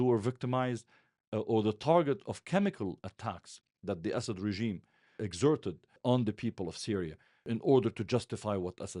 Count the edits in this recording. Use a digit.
3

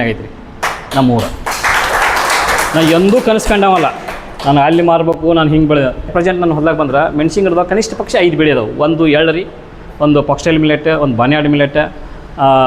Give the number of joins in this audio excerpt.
1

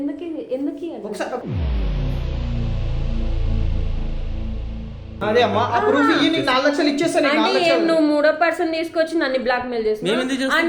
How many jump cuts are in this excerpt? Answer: 1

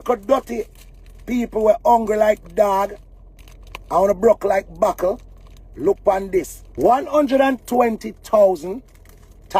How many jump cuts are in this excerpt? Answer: 1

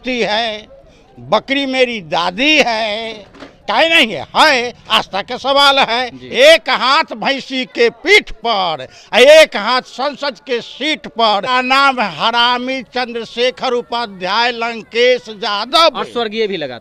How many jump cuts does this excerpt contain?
2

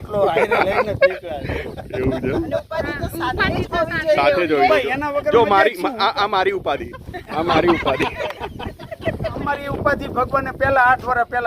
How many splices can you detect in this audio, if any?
1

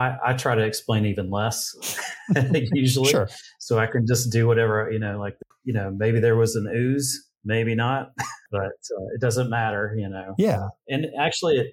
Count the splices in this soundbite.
2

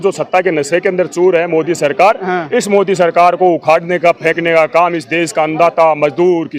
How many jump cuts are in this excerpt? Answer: 0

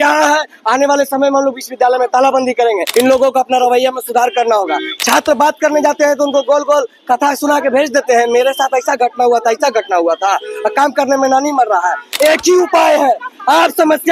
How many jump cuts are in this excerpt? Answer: 2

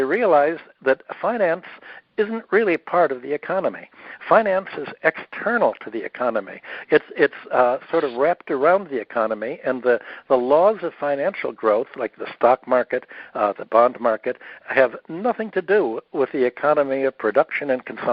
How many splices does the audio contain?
0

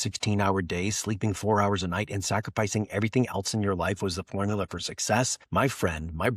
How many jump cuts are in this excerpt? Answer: 1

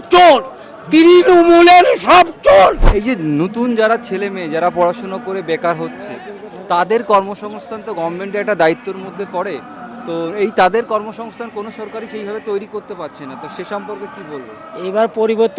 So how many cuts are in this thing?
1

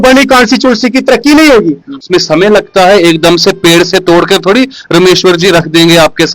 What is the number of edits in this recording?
1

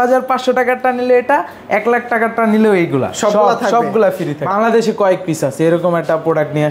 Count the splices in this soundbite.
1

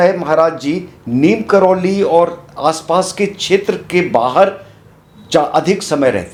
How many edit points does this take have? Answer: 0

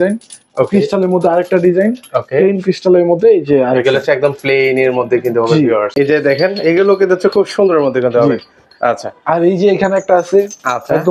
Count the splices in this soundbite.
1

